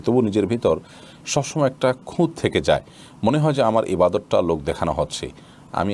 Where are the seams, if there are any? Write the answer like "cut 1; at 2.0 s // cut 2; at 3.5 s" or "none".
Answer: none